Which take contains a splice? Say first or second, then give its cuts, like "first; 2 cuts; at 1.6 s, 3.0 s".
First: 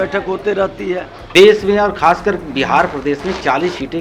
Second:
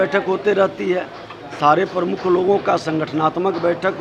first; 1 cut; at 1.2 s